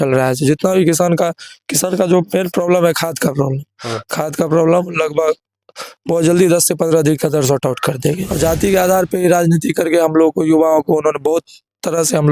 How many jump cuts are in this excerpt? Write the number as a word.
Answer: one